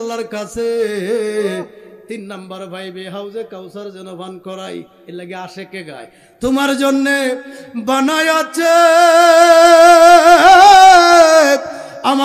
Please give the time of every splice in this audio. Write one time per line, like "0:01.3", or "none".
none